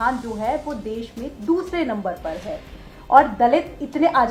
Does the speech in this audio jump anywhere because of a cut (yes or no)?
no